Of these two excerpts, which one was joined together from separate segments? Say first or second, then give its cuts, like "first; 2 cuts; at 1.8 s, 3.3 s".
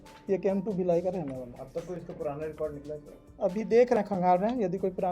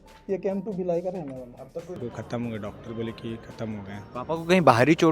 second; 1 cut; at 2.0 s